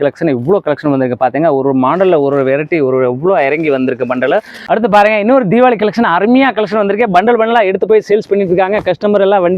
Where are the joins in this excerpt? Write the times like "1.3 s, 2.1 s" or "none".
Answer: 4.5 s

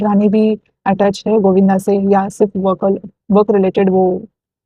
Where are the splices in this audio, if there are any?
none

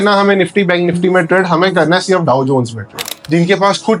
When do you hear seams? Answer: 3.1 s

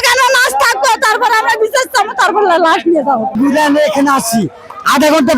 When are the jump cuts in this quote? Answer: 3.3 s

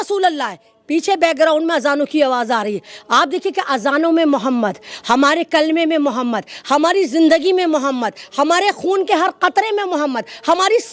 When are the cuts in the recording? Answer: none

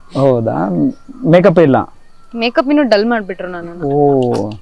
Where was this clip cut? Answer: none

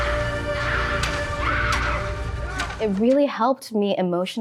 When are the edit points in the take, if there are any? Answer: none

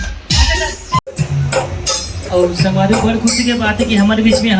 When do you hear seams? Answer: 1.0 s

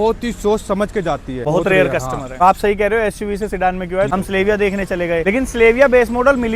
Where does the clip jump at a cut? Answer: 1.4 s, 2.4 s, 4.1 s, 5.2 s

